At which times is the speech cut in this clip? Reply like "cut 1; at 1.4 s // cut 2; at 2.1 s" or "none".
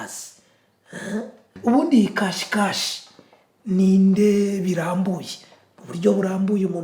cut 1; at 1.4 s